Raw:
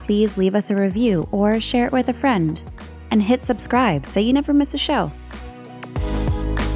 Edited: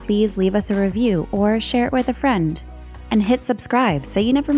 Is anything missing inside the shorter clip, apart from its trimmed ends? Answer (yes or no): no